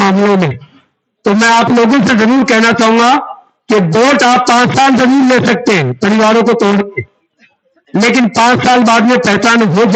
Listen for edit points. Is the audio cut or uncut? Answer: uncut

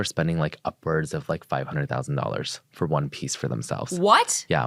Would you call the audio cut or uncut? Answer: uncut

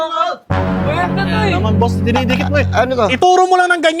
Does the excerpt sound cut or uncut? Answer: uncut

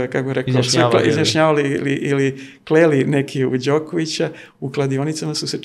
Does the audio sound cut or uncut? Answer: uncut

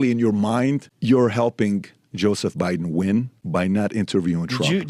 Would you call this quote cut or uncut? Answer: cut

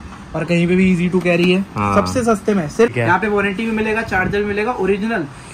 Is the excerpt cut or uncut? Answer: cut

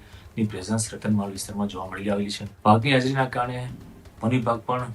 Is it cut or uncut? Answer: cut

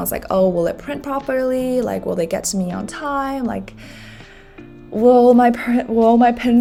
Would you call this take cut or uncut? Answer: uncut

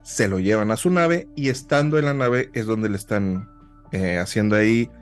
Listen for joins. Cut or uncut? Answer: uncut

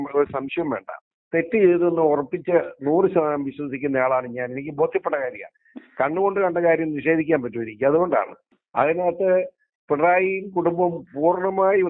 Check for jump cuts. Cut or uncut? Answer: uncut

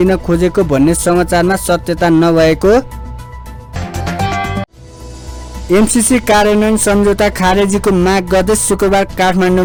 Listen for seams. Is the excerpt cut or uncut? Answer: uncut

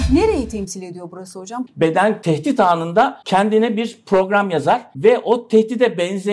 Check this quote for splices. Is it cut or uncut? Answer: cut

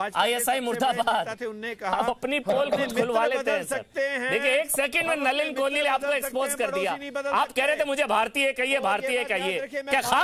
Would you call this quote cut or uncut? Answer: uncut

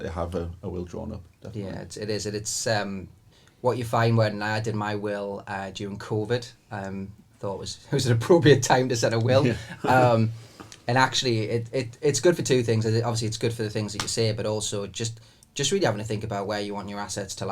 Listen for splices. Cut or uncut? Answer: uncut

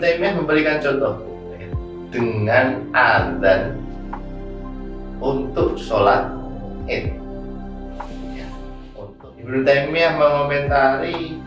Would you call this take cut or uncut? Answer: cut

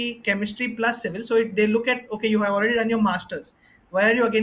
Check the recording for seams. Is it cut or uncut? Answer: uncut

